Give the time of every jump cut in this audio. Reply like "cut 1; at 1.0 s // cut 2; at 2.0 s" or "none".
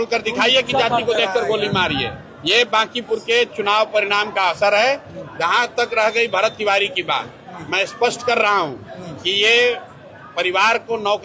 none